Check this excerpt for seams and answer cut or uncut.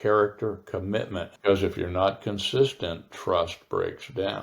cut